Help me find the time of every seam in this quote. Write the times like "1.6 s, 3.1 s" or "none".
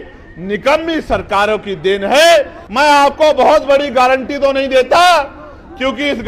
2.6 s